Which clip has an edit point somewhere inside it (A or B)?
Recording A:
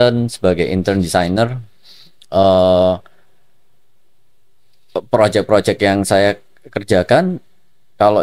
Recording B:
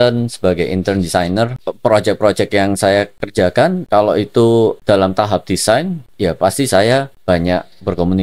B